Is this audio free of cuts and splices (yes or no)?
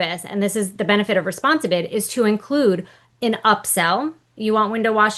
yes